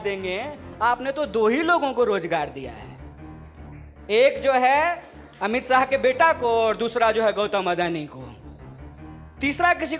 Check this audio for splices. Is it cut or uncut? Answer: uncut